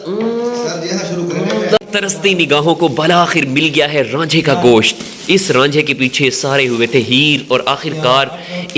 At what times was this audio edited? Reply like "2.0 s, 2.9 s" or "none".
1.8 s

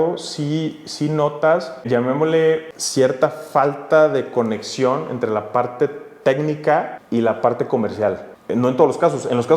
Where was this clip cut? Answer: 1.8 s, 2.7 s, 7.0 s, 8.3 s

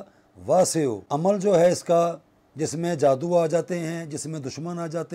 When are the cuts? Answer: 1.0 s

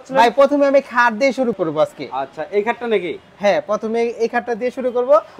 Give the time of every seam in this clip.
1.5 s

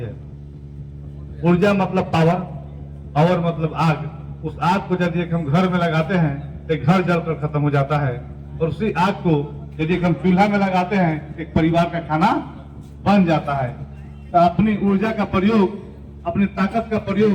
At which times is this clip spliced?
none

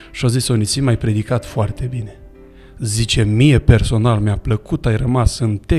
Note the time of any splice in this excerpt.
none

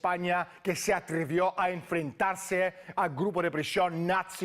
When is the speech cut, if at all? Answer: 3.3 s

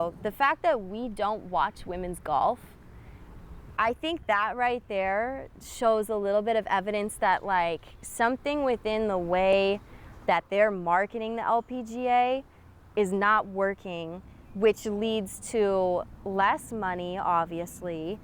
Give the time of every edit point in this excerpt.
none

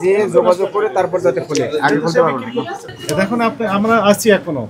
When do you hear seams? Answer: 2.9 s

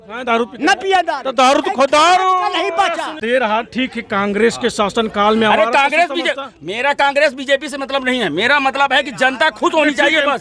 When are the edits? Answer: 3.1 s

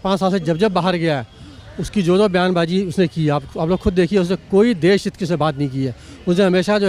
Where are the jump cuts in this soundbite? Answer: none

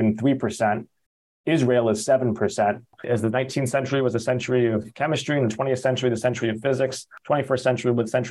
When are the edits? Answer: 2.9 s, 7.1 s

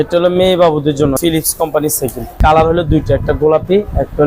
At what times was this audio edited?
1.2 s, 2.4 s

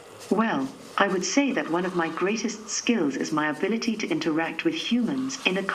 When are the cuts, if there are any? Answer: none

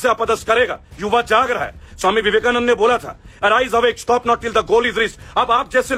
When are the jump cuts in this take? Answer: none

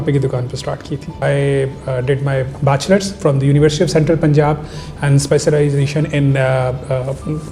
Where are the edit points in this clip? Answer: 1.2 s

